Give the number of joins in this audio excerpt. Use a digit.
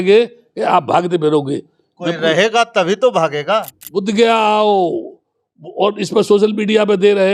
1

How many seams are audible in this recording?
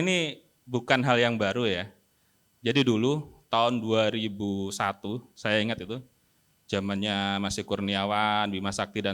0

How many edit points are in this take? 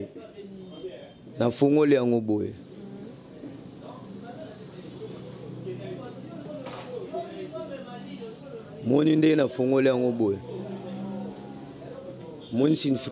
0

